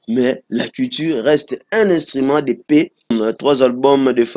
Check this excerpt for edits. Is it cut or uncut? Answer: cut